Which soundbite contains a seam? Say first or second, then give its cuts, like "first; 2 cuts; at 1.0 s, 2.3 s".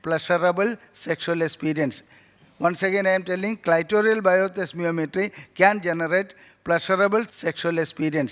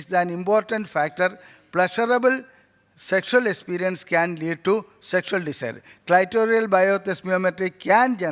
first; 1 cut; at 7.3 s